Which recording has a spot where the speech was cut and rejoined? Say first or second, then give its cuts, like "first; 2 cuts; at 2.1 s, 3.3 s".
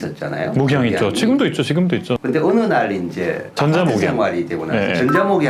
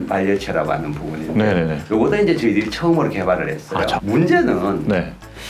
second; 1 cut; at 4.0 s